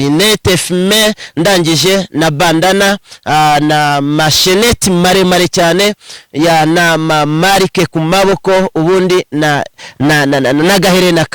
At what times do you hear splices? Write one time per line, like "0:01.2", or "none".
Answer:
none